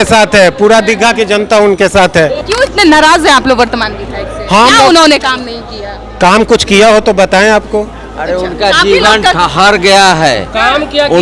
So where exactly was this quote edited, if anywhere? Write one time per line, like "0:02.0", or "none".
0:02.4